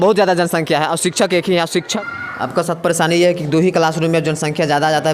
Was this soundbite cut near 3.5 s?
no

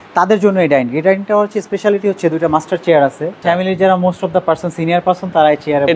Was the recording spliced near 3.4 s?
yes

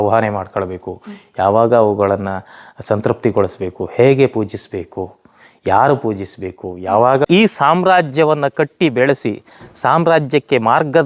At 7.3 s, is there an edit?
yes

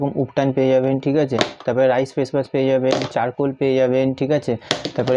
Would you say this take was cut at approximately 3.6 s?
no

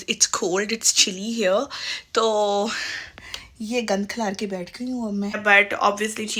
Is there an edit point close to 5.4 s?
yes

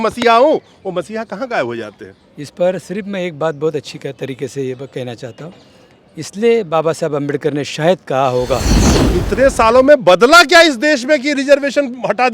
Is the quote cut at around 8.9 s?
yes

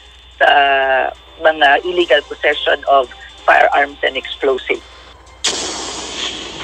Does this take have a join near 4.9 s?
yes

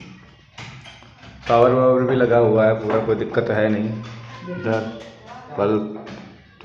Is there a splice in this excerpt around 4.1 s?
no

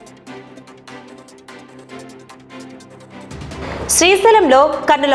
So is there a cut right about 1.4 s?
yes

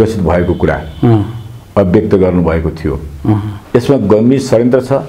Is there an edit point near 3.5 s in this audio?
yes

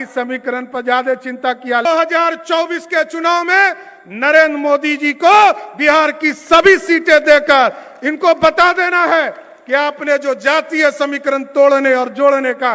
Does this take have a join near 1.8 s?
yes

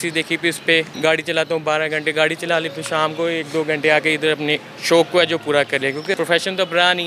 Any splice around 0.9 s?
yes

